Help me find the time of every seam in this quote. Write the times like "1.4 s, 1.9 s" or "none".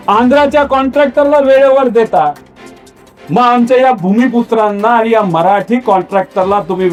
none